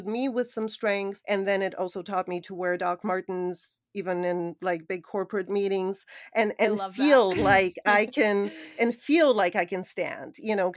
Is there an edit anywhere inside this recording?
yes; 1 cut; at 1.2 s

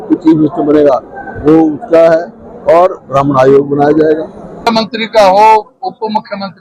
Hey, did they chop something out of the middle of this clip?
yes; 1 cut; at 4.7 s

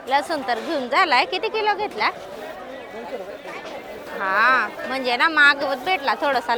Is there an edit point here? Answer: no; 0 cuts

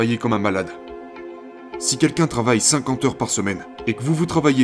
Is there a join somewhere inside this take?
yes; 2 cuts; at 1.3 s, 3.7 s

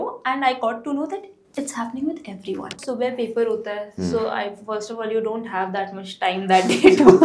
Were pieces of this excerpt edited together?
yes; 1 cut; at 2.8 s

